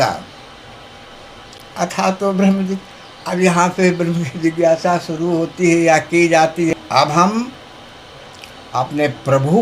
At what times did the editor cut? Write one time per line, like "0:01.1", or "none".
0:01.6
0:06.7